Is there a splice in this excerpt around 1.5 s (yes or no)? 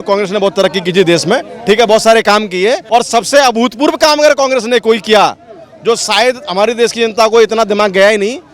no